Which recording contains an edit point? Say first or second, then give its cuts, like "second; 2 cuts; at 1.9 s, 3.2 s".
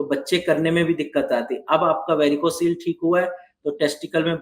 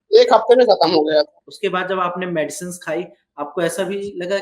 second; 1 cut; at 1.5 s